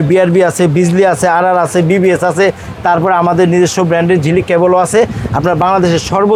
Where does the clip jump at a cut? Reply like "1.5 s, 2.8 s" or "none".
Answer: none